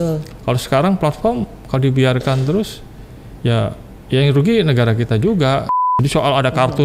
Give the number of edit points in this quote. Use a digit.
1